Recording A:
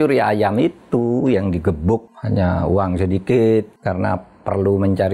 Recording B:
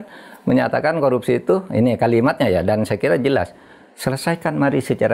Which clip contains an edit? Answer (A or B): A